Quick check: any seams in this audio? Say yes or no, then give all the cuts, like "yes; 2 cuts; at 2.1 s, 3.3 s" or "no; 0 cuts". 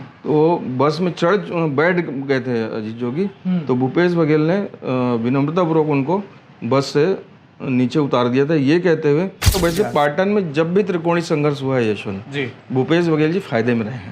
yes; 1 cut; at 9.6 s